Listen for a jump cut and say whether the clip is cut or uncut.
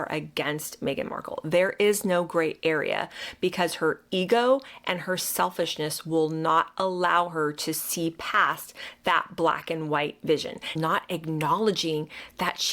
cut